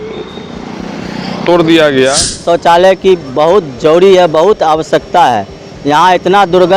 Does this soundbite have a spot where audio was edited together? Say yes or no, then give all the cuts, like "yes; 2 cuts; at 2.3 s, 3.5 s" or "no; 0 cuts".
yes; 1 cut; at 2.4 s